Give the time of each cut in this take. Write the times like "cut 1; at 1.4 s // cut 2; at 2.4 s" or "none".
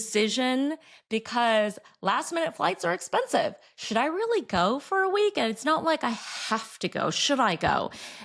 none